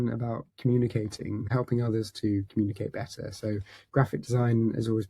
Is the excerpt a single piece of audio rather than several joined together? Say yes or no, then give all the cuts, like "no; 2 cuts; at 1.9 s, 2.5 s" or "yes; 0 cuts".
no; 1 cut; at 1.5 s